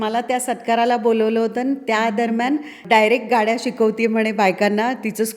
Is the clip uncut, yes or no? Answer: no